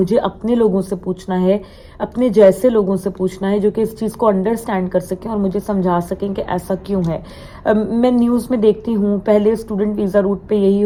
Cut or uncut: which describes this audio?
uncut